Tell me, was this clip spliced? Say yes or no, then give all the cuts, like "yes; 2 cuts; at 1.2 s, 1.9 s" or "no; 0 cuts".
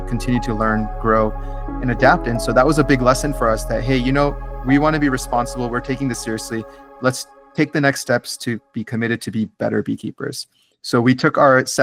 no; 0 cuts